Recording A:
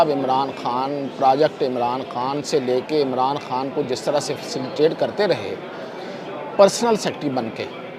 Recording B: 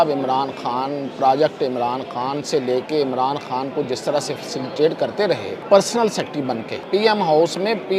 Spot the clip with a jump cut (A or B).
B